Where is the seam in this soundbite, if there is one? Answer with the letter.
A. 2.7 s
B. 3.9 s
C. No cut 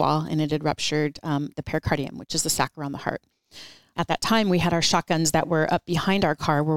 B